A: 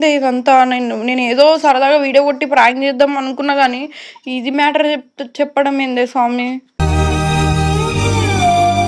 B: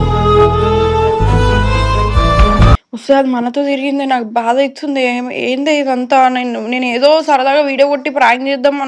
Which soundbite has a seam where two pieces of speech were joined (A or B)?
B